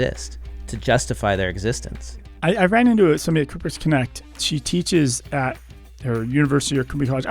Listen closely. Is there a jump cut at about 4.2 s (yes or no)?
no